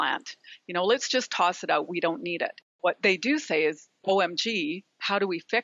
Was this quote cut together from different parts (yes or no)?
yes